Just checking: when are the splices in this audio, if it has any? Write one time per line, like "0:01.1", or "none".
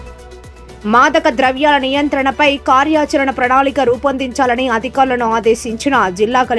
none